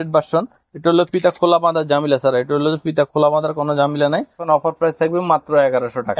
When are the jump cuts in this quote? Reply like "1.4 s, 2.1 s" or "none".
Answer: 4.4 s